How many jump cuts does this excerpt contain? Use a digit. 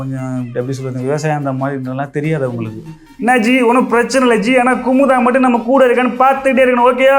1